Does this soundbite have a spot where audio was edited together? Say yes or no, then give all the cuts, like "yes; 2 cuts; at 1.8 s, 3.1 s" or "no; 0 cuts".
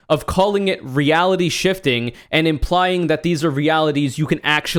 no; 0 cuts